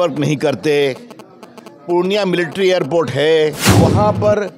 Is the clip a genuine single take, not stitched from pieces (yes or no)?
no